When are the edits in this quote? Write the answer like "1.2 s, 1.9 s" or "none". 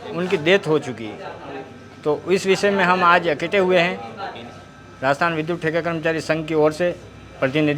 none